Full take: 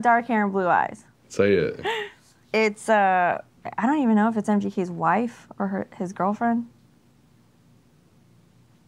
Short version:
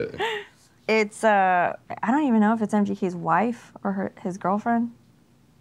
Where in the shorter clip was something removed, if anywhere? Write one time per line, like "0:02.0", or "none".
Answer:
0:01.9

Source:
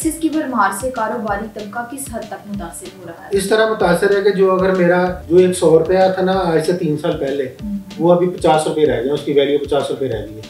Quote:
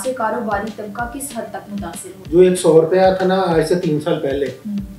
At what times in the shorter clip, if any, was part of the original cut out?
0:02.2

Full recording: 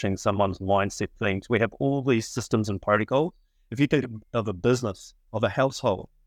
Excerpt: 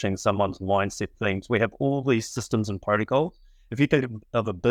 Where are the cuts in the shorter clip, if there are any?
none

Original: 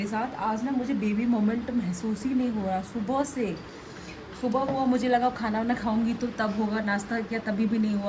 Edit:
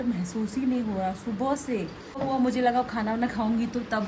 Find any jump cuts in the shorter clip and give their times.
0:02.2

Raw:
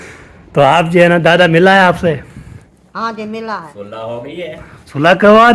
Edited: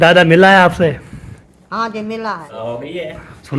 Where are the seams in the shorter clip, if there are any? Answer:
0:02.5

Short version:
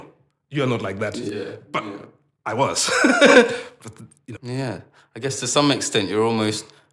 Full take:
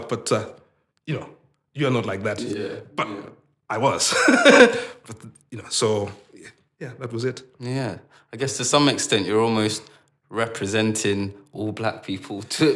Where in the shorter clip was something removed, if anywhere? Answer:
0:04.3

